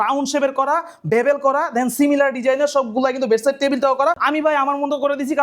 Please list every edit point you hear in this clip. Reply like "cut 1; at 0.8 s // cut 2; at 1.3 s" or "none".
cut 1; at 4.2 s